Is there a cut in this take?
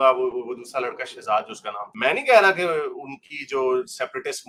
no; 0 cuts

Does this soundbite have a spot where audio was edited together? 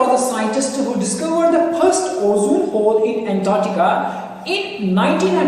no; 0 cuts

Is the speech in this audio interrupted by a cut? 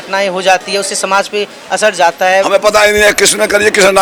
no; 0 cuts

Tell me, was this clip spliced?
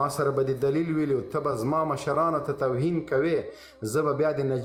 no; 0 cuts

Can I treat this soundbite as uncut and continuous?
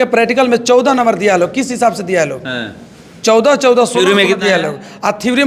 yes; 0 cuts

